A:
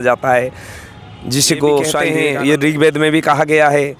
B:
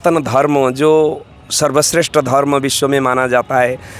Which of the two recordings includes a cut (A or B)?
A